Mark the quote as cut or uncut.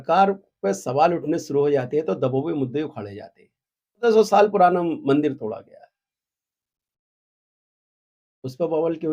cut